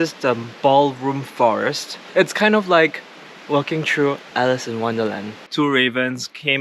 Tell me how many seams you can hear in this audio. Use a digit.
1